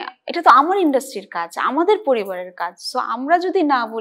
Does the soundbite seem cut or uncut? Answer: uncut